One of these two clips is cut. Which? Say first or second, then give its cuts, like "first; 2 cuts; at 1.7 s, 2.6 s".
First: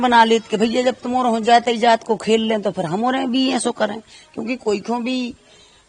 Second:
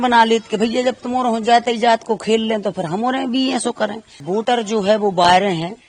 second; 1 cut; at 4.1 s